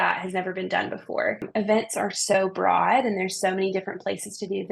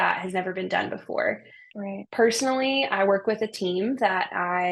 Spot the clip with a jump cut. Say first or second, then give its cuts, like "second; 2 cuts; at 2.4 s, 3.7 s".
first; 1 cut; at 1.5 s